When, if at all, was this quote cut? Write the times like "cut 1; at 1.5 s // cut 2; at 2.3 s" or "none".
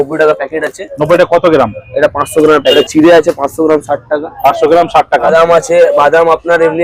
cut 1; at 2.7 s // cut 2; at 5.3 s